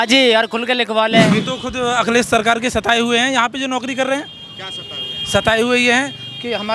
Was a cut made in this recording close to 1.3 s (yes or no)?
yes